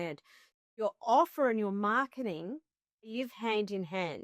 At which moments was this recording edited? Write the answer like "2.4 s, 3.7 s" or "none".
3.2 s